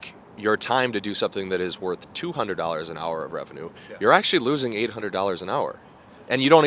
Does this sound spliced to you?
no; 0 cuts

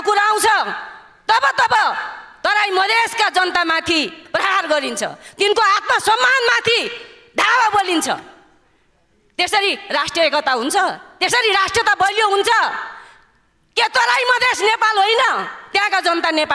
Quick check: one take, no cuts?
yes; 0 cuts

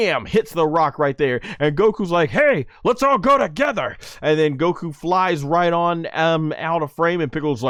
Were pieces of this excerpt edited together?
no; 0 cuts

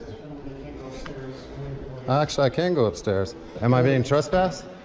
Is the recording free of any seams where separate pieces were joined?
no; 1 cut; at 3.5 s

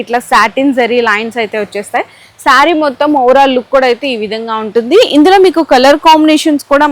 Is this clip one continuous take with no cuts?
yes; 0 cuts

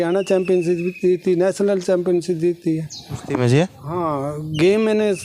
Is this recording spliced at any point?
no; 0 cuts

